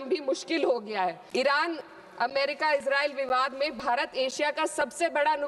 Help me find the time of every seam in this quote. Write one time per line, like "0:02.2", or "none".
0:01.2